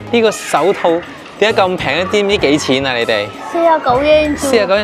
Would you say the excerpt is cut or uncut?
uncut